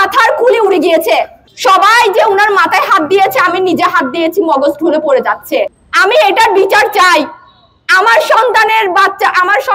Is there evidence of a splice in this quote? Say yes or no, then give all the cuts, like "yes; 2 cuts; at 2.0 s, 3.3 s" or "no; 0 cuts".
yes; 2 cuts; at 1.4 s, 5.8 s